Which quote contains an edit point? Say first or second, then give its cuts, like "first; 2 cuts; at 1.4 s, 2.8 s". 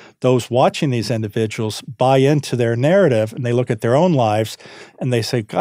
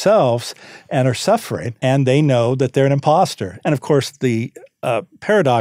second; 2 cuts; at 1.6 s, 3.5 s